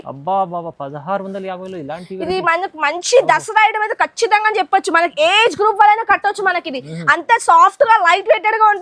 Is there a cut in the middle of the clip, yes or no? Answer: no